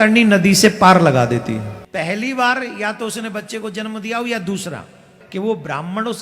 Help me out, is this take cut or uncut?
cut